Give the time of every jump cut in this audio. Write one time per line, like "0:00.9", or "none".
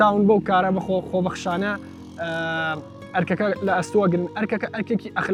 none